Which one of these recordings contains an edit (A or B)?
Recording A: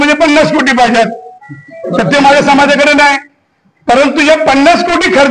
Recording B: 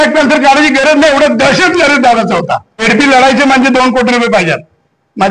B